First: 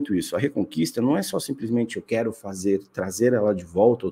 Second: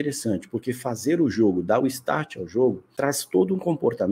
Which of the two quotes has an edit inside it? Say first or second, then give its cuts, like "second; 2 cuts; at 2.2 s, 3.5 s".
second; 1 cut; at 2.9 s